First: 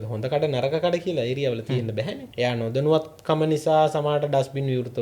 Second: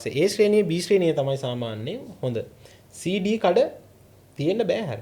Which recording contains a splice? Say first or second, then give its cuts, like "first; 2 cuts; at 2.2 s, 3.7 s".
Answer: first; 1 cut; at 2.2 s